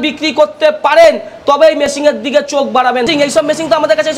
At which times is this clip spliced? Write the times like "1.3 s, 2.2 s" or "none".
3.1 s